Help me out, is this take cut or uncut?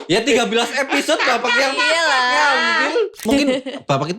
cut